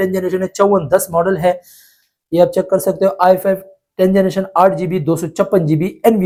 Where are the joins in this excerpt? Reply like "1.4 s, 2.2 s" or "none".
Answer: none